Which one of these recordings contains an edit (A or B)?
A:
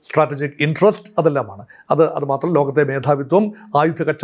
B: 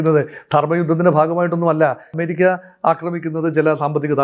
B